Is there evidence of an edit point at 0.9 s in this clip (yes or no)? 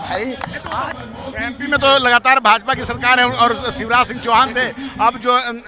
yes